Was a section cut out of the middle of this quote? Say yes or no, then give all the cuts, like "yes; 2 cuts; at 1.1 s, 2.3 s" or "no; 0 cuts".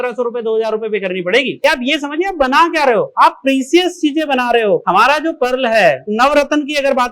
yes; 2 cuts; at 1.6 s, 6.1 s